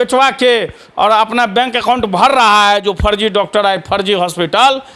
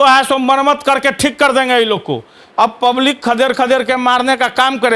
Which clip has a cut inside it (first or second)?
second